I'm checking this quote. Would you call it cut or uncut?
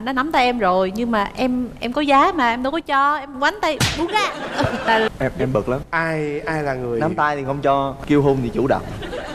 cut